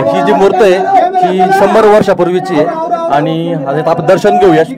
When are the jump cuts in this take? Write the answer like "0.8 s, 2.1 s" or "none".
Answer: none